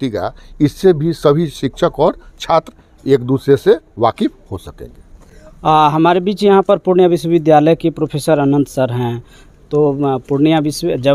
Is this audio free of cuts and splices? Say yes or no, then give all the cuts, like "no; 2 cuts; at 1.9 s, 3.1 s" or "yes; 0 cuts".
yes; 0 cuts